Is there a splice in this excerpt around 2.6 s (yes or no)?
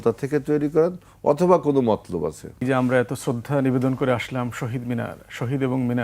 yes